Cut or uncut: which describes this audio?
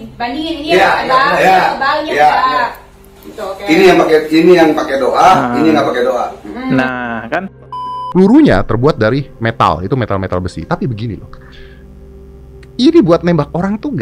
cut